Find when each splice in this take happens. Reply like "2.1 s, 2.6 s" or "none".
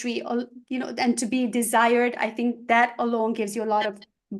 none